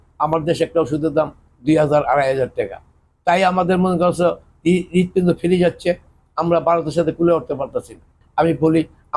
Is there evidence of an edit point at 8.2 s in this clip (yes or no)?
yes